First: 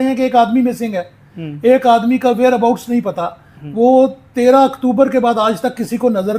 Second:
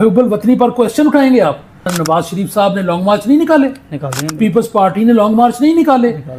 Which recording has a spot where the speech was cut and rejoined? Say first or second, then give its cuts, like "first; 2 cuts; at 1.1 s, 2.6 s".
second; 1 cut; at 1.9 s